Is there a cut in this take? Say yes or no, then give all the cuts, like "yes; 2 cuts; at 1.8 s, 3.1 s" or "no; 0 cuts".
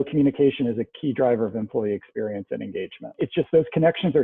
yes; 1 cut; at 3.2 s